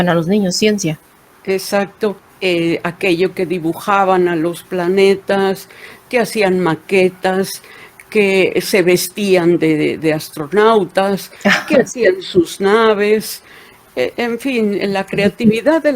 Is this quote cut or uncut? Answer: cut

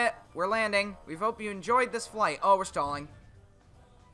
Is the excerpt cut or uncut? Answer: cut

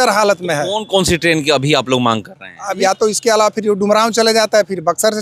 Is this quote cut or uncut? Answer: cut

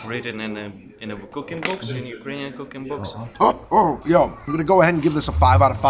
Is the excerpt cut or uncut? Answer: cut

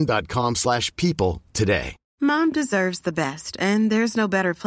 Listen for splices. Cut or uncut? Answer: cut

